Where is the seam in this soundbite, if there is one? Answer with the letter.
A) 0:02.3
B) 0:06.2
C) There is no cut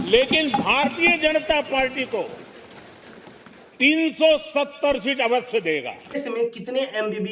B